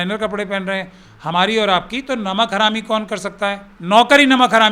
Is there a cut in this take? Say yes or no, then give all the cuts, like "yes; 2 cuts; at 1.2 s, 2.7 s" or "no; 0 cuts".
yes; 1 cut; at 3.7 s